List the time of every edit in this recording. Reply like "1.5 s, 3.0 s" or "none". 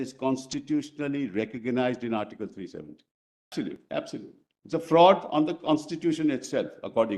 3.5 s